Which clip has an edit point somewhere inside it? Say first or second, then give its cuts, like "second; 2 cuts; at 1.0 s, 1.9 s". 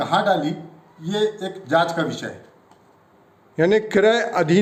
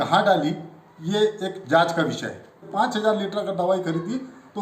second; 1 cut; at 2.6 s